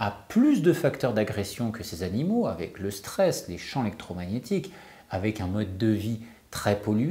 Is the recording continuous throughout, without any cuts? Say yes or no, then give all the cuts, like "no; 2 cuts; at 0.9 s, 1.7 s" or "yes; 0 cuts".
yes; 0 cuts